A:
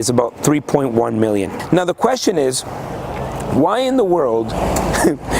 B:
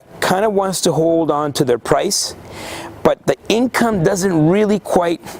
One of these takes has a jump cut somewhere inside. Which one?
A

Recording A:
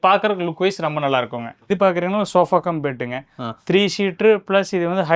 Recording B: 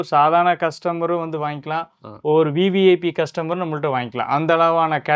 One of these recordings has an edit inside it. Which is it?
A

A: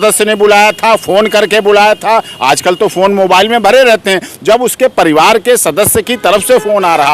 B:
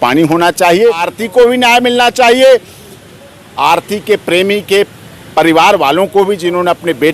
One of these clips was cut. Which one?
B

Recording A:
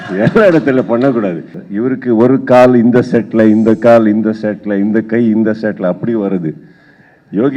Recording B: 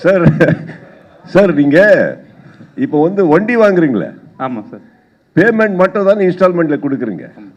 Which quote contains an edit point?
A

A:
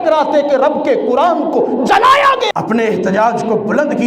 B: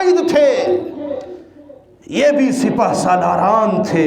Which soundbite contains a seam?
A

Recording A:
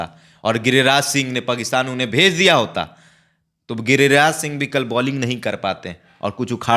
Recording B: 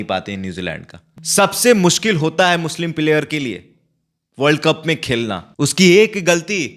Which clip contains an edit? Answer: B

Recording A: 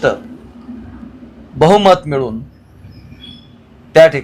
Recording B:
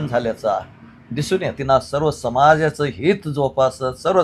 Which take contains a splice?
B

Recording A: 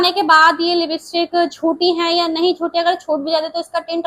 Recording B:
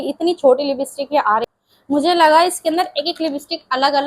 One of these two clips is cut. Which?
B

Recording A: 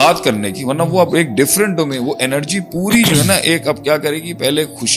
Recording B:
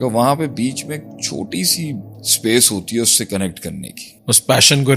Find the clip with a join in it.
B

